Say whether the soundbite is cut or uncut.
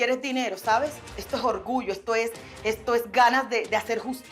uncut